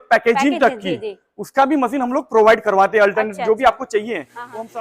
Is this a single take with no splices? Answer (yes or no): yes